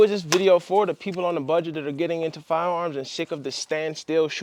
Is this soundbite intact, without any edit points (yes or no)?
yes